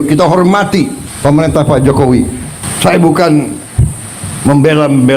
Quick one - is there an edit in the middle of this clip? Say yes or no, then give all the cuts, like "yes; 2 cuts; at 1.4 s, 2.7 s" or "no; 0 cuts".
yes; 2 cuts; at 1.0 s, 2.7 s